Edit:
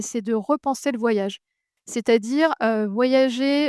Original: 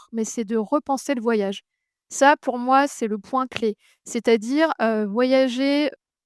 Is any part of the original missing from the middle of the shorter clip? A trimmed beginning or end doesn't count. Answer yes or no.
yes